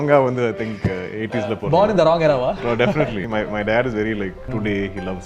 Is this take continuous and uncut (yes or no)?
no